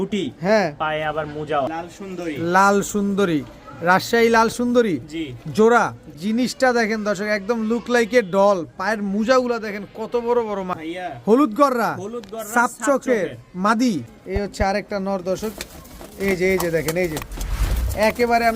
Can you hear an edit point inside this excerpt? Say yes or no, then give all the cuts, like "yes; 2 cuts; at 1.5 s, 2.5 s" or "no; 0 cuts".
yes; 4 cuts; at 1.8 s, 6.1 s, 10.8 s, 14.1 s